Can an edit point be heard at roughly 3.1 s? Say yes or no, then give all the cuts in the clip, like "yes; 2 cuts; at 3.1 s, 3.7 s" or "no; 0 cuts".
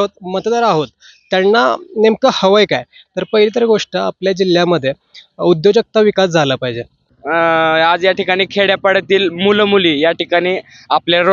no; 1 cut; at 7.1 s